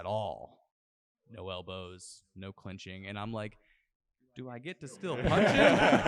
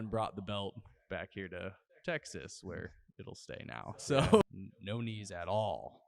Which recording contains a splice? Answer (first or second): second